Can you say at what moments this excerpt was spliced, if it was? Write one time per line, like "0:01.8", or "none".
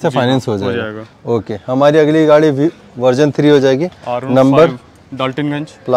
none